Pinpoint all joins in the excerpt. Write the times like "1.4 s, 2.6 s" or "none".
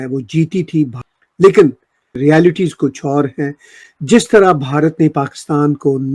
1.0 s, 2.1 s